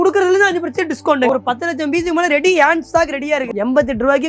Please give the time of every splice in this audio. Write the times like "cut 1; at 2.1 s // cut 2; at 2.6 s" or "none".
cut 1; at 1.3 s // cut 2; at 3.5 s